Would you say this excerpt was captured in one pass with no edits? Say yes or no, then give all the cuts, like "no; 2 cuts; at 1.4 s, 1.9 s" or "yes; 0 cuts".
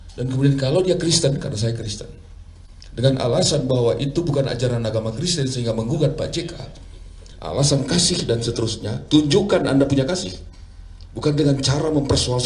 yes; 0 cuts